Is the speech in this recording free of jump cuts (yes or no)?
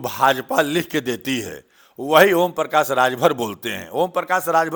yes